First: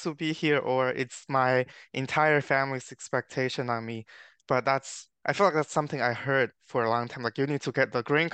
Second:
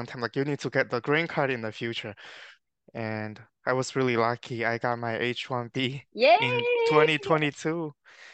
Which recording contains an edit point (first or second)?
second